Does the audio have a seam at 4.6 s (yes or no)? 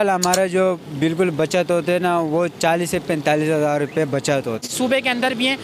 yes